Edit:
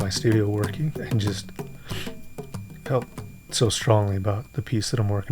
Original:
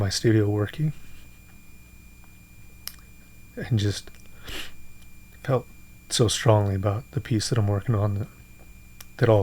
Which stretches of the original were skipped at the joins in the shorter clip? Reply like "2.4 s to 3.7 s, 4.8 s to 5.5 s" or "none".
0.9 s to 3.5 s

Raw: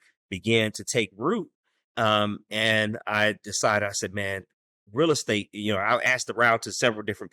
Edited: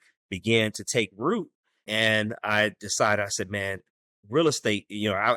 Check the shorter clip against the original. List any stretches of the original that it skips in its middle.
1.8 s to 2.4 s

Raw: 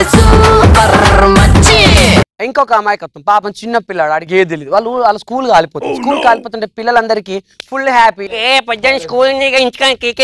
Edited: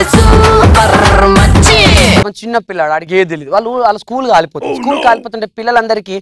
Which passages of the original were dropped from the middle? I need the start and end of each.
2.3 s to 3.5 s

